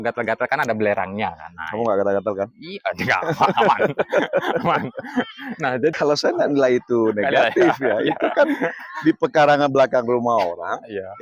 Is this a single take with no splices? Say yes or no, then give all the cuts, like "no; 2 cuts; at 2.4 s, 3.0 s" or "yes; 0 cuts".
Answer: no; 1 cut; at 5.9 s